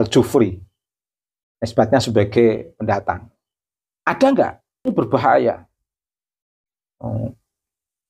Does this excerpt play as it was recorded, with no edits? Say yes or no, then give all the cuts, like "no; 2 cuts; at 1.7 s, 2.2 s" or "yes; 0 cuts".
no; 1 cut; at 4.7 s